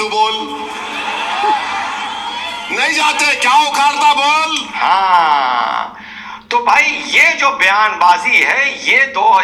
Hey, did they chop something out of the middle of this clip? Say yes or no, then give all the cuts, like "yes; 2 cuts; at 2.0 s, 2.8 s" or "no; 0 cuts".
no; 0 cuts